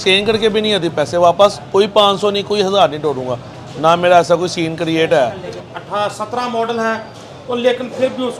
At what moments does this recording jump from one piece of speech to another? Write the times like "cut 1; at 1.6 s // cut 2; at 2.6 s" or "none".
cut 1; at 5.5 s